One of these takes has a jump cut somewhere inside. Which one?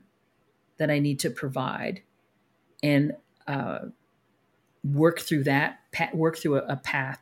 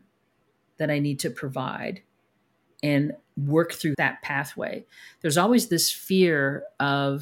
second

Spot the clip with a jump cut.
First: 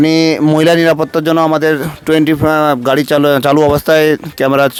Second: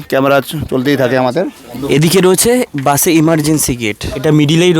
second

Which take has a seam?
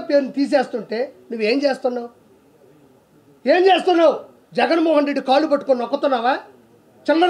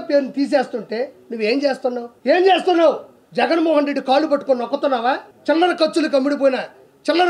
second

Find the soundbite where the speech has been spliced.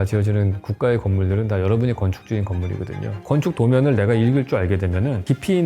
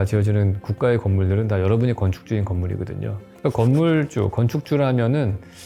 first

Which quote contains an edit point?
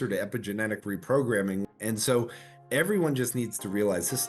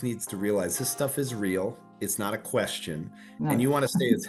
first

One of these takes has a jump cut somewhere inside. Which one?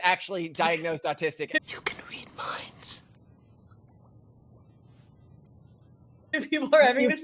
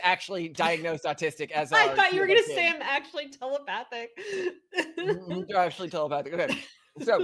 first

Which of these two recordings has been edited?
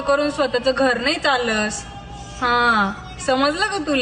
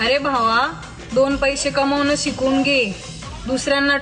first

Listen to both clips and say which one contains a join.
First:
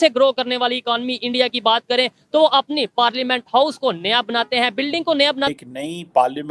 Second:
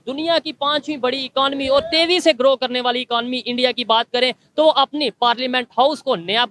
first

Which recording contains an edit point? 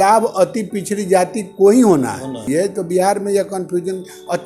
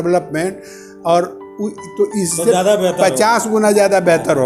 first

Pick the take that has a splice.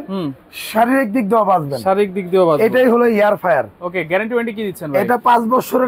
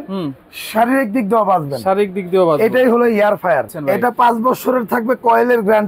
second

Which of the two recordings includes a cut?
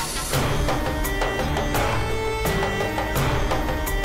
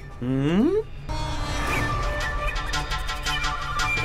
second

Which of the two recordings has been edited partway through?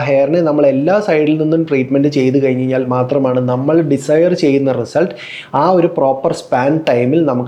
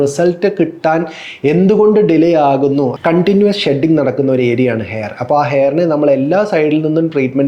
second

